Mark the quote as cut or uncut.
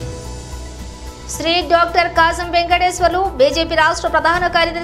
uncut